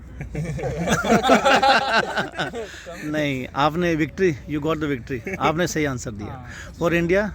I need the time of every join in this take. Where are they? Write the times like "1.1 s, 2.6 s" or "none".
none